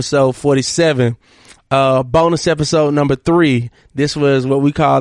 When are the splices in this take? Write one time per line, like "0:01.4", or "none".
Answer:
0:01.3